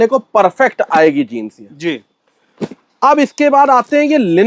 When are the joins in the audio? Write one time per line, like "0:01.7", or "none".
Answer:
none